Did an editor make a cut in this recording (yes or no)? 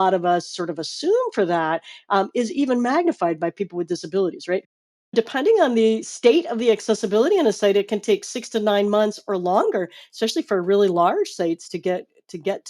yes